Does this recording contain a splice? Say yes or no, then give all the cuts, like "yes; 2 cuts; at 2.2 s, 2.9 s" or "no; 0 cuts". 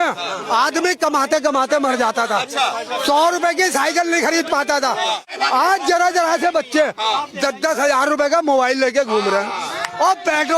yes; 1 cut; at 5.3 s